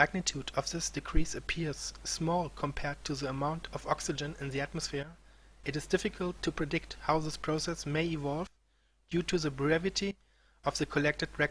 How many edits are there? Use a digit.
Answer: 0